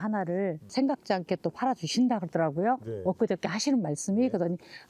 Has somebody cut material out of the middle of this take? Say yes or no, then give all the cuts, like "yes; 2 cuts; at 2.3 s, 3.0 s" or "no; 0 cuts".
no; 0 cuts